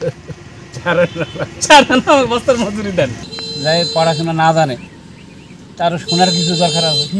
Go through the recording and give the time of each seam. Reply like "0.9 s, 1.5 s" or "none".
3.2 s